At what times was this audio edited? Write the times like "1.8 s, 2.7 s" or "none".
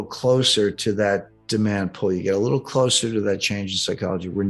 none